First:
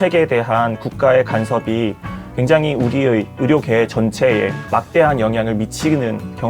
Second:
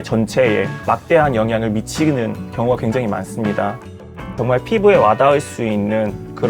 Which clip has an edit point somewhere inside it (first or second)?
second